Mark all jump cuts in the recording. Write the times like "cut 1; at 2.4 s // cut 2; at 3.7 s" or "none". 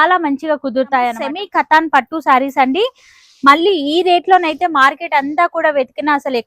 cut 1; at 1.2 s